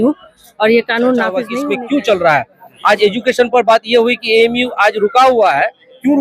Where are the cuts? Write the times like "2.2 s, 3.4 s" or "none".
1.5 s